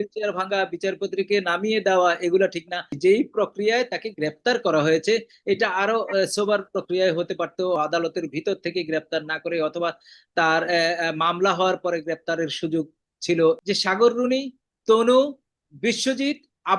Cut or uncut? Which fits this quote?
cut